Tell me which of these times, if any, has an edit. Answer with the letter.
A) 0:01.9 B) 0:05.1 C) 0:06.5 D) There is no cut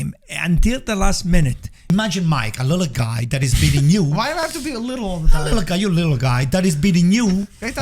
A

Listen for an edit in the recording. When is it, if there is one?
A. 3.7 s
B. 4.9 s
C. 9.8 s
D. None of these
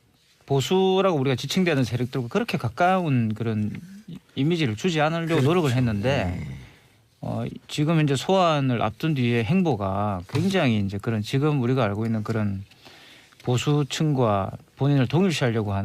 C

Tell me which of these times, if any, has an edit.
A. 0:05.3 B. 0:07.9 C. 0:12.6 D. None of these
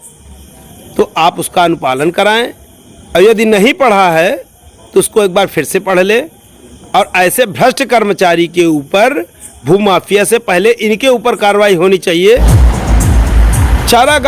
C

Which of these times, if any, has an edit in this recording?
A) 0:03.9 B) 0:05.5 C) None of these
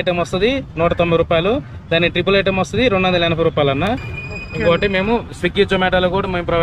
A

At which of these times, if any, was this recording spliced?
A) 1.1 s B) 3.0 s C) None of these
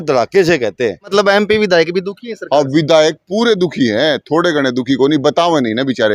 A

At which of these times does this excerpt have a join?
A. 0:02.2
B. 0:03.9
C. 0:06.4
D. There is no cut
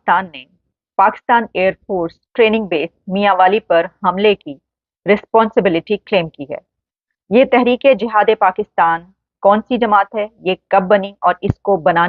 D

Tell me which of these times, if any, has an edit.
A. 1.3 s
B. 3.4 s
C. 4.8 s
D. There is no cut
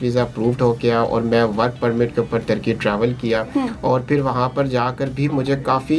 D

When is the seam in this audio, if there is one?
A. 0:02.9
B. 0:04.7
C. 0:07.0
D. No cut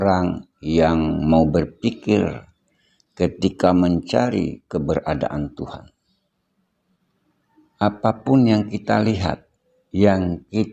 C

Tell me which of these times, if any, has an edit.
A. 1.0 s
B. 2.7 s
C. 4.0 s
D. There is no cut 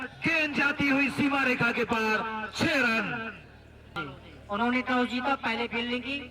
C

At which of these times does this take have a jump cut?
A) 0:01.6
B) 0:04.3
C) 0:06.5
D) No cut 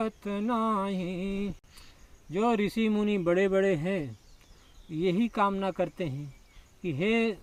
D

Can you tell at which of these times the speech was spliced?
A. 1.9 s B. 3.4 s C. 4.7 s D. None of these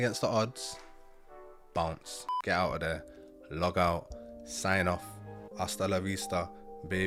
D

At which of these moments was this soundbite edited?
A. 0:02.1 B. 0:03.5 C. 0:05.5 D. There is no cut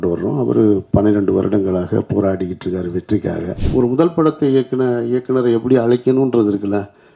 B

